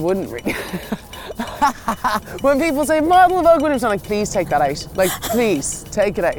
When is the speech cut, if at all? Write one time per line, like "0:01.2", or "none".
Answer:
0:02.3
0:04.8